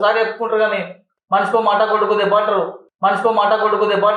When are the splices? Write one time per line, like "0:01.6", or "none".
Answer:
none

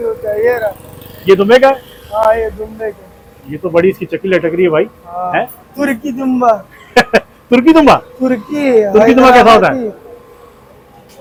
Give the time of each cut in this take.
none

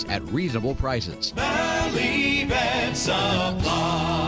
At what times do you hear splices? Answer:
0:01.2

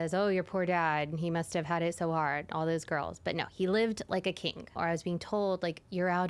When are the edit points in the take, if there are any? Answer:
0:04.7

